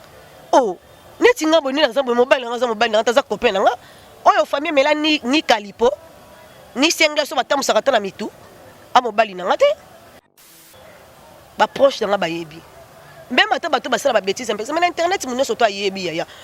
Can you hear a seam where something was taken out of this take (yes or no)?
yes